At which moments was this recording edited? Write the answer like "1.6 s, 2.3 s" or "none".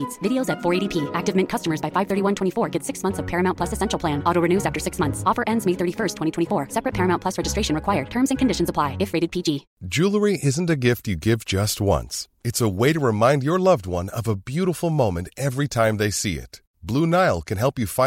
9.8 s

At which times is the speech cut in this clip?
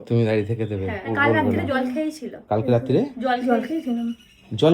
1.1 s

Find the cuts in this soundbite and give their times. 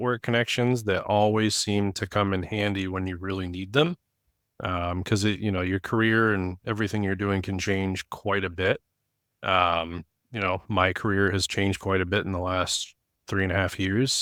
none

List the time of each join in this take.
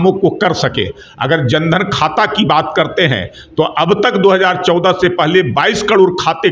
none

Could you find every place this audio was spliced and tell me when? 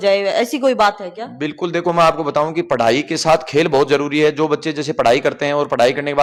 none

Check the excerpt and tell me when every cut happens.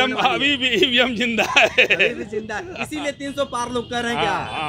none

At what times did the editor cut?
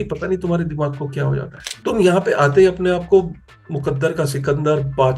1.6 s

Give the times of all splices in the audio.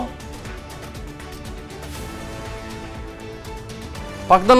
2.6 s

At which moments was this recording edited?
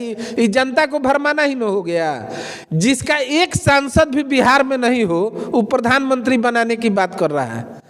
none

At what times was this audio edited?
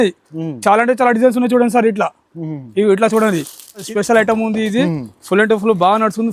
3.8 s

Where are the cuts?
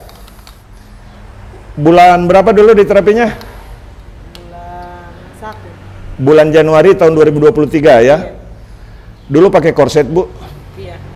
none

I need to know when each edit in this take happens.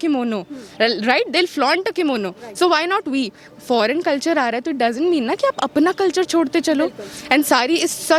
none

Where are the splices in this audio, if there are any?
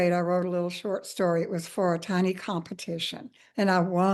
none

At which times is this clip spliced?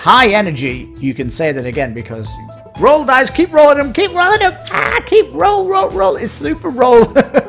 none

